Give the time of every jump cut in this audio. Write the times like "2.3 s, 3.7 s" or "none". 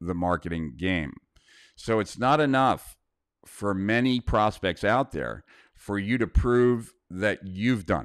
none